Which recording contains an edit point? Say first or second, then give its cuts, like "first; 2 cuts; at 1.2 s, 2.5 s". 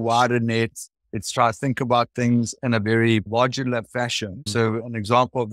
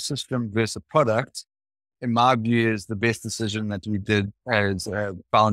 first; 2 cuts; at 3.3 s, 4.5 s